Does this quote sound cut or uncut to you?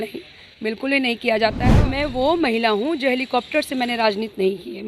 cut